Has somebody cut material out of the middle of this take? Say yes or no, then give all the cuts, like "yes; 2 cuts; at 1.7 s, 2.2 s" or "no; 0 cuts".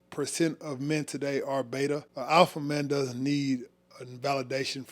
yes; 1 cut; at 2.1 s